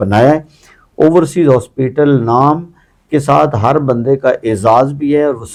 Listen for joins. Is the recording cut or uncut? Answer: uncut